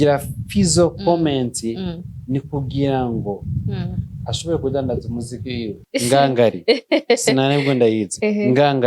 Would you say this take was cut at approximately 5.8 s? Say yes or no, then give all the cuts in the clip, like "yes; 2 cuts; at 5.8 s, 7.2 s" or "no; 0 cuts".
yes; 1 cut; at 5.8 s